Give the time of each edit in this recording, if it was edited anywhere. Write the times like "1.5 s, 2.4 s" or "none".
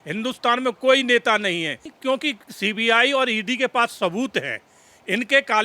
1.9 s